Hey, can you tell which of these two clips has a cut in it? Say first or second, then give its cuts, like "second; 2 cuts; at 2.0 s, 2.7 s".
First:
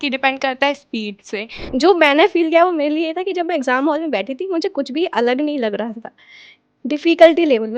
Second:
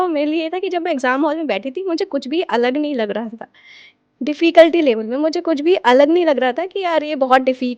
first; 1 cut; at 1.6 s